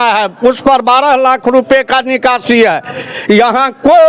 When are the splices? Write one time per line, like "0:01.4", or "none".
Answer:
0:03.1